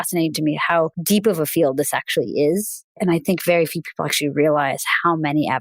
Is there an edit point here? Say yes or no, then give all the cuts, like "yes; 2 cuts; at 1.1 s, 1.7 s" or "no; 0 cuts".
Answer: yes; 2 cuts; at 1.0 s, 2.8 s